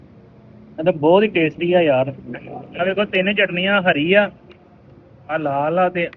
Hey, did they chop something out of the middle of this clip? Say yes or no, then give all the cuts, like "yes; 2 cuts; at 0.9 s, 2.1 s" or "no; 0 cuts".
no; 0 cuts